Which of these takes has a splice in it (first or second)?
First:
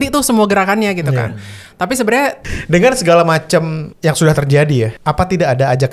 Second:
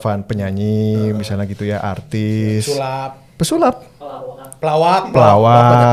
first